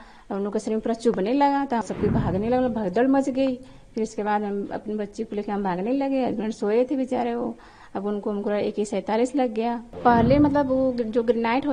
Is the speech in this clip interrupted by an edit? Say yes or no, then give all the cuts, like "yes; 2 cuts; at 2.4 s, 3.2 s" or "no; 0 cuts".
yes; 2 cuts; at 1.8 s, 9.9 s